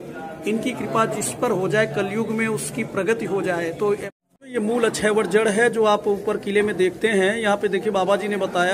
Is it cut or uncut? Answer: cut